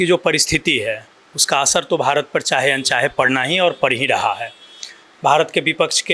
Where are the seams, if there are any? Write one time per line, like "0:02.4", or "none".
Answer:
none